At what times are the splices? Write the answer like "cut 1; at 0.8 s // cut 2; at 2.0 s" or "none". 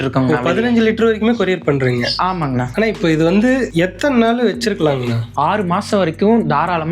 cut 1; at 2.6 s // cut 2; at 3.7 s // cut 3; at 5.3 s